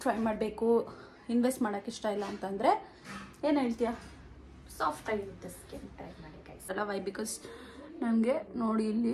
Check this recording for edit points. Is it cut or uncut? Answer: cut